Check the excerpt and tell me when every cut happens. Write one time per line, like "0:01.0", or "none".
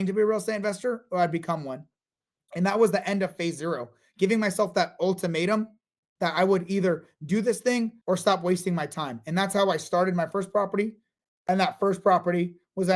none